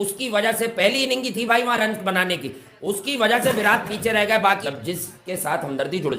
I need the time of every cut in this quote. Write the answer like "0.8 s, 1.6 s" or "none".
4.6 s